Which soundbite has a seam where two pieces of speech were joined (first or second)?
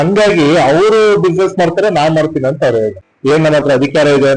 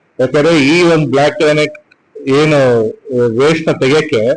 first